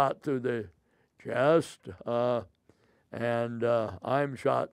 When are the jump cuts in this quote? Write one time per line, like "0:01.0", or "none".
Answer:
none

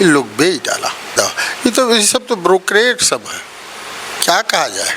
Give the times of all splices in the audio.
0:01.1

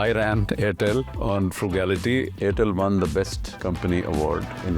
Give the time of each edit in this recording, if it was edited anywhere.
0:01.1
0:02.3

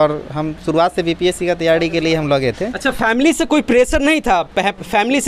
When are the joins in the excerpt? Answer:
none

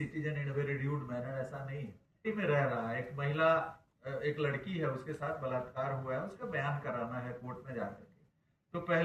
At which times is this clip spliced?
0:02.2

